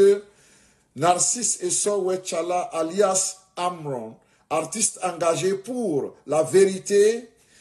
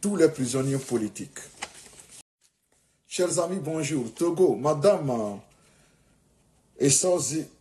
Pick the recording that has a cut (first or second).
second